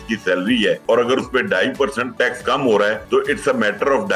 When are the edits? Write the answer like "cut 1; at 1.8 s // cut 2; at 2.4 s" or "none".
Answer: cut 1; at 0.8 s // cut 2; at 2.0 s // cut 3; at 3.0 s